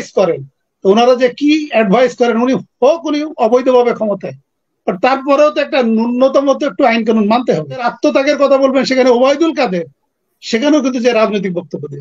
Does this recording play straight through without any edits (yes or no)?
no